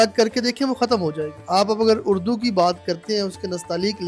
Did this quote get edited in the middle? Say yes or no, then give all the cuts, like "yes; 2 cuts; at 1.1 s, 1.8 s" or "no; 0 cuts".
yes; 1 cut; at 1.3 s